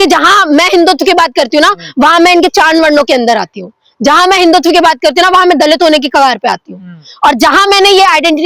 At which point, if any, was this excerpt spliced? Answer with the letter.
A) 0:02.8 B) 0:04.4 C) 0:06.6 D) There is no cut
D